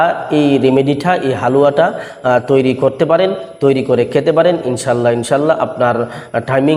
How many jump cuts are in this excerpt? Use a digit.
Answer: 0